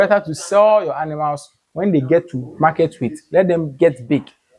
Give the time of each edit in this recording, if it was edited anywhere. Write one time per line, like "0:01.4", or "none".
none